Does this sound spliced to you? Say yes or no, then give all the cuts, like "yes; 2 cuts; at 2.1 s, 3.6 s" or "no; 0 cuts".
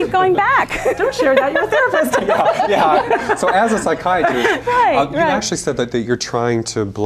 no; 0 cuts